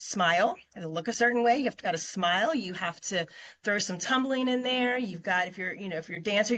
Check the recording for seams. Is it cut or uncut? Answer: uncut